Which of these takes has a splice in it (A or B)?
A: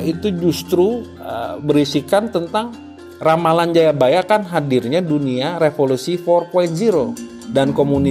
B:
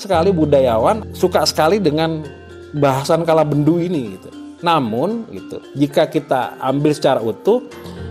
B